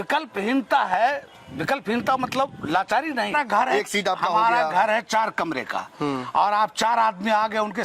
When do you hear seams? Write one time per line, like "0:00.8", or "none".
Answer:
0:03.3